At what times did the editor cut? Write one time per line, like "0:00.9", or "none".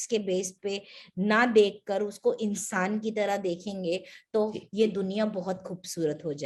none